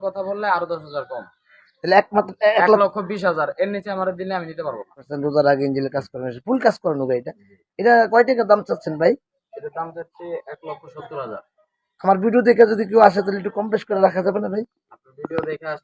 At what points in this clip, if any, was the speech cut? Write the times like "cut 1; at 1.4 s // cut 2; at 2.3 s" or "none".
cut 1; at 5.1 s